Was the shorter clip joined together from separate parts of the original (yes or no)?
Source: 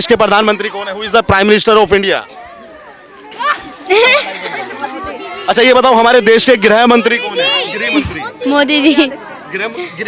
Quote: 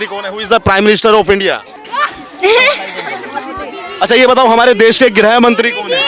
yes